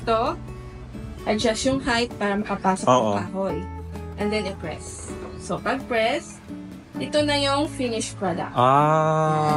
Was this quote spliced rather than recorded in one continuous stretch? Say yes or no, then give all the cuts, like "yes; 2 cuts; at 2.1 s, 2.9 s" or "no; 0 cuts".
no; 0 cuts